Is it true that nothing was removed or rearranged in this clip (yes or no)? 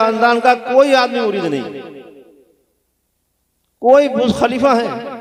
yes